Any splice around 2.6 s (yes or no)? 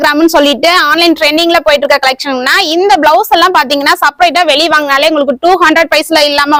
no